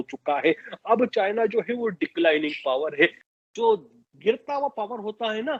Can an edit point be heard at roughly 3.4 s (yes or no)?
no